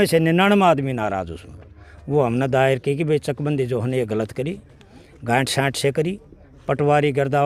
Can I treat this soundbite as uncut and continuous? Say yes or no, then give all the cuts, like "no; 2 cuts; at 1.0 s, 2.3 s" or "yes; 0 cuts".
yes; 0 cuts